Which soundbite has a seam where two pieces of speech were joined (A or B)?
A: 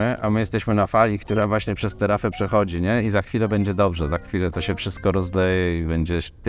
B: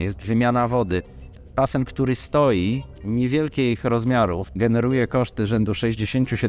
B